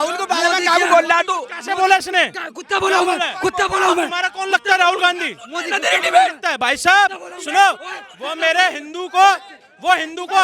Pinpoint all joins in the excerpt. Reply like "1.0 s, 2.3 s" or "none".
none